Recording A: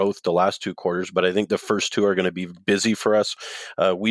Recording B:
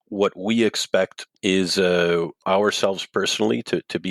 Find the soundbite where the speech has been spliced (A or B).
B